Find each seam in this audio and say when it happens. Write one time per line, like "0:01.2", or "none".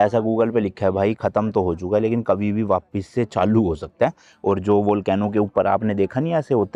none

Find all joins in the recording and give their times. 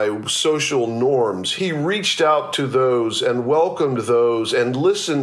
0:01.5

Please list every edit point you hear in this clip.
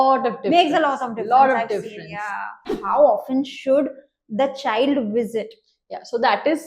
0:02.6

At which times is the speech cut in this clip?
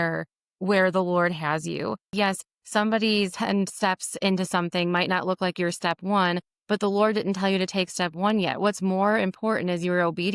0:02.1
0:03.3

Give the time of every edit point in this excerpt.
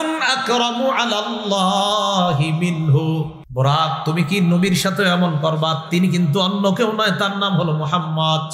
0:03.4

